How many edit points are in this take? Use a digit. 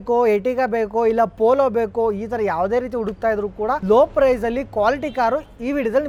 0